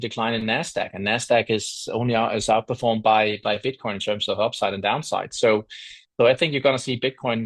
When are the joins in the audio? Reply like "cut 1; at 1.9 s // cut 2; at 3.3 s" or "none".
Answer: none